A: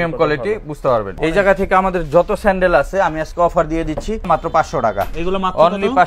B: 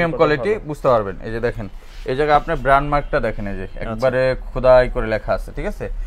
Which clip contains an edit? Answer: A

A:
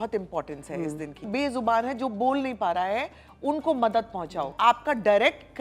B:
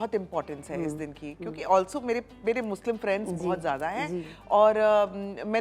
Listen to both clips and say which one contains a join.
A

